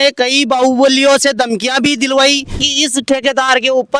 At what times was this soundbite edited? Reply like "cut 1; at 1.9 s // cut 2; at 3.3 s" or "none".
cut 1; at 2.7 s